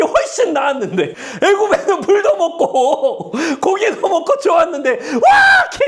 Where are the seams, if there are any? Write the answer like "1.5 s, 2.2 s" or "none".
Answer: 1.2 s

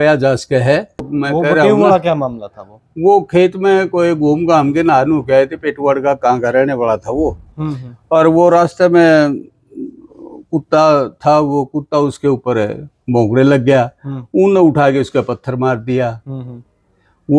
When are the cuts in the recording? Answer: 1.1 s

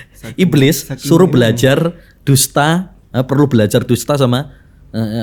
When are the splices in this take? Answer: none

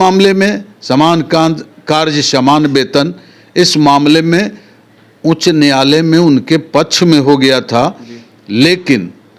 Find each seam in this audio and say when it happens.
none

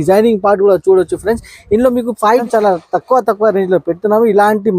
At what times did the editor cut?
2.4 s

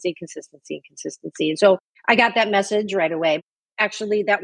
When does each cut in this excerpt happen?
1.8 s, 3.4 s

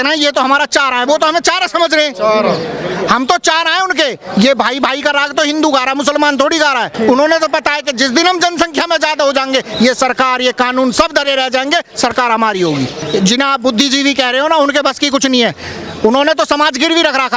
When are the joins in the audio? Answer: 6.9 s, 13.0 s

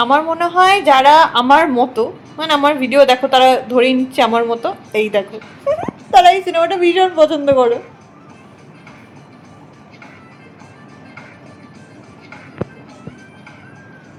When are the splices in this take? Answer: none

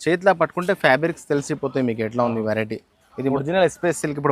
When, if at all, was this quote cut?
3.4 s

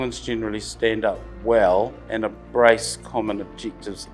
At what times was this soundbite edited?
1.3 s, 2.0 s

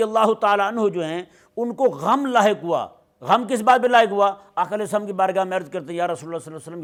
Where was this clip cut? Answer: none

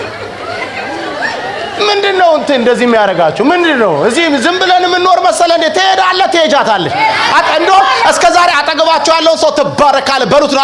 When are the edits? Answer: none

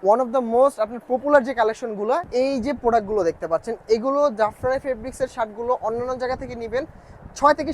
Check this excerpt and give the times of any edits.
2.3 s

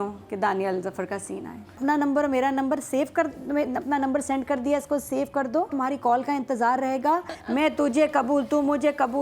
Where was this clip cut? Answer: 1.8 s, 5.7 s, 7.4 s

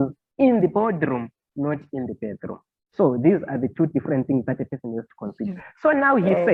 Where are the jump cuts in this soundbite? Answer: none

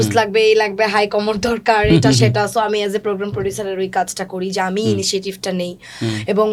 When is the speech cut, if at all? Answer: none

